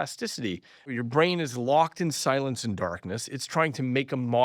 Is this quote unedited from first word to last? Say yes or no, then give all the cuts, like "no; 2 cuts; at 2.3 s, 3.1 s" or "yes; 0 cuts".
no; 1 cut; at 1.0 s